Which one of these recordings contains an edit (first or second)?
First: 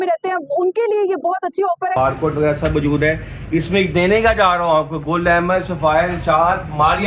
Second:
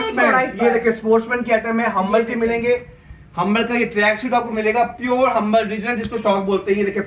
first